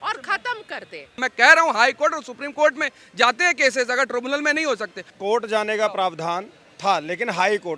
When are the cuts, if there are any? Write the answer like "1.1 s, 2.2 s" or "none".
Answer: 1.2 s, 5.0 s